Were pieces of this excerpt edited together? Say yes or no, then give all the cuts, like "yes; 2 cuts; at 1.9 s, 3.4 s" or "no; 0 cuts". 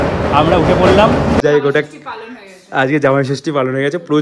yes; 1 cut; at 1.4 s